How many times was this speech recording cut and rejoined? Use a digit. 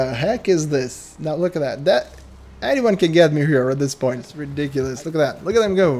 1